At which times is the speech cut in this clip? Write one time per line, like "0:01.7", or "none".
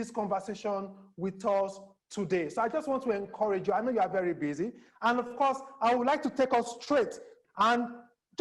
0:07.4